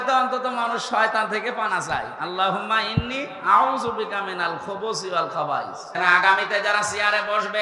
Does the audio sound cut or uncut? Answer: cut